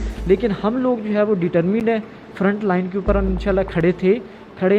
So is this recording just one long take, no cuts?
yes; 0 cuts

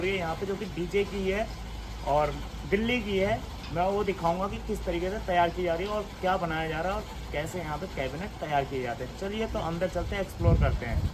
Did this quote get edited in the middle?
no; 0 cuts

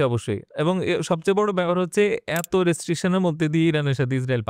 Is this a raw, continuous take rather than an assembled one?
yes; 0 cuts

